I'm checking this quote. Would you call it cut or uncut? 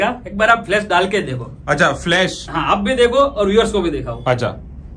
uncut